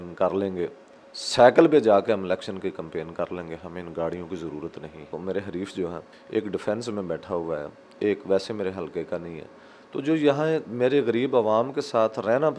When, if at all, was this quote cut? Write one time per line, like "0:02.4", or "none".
0:05.1
0:06.1